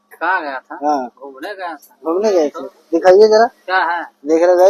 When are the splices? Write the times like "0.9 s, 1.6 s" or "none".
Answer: none